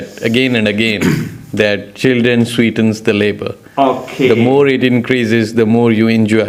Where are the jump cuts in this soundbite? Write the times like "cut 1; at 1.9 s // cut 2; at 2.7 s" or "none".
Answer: none